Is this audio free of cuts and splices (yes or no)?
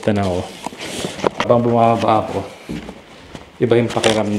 no